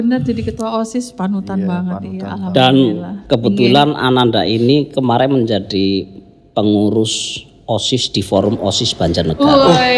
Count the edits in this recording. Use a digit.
0